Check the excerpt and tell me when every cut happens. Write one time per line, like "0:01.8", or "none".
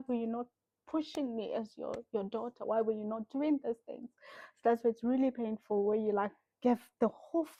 none